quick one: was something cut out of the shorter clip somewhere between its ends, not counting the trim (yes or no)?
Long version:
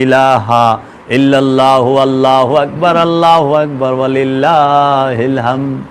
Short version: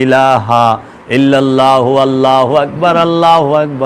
no